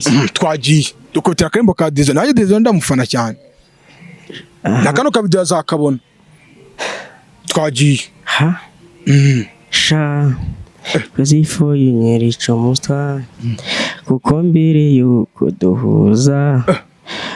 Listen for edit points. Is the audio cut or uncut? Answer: uncut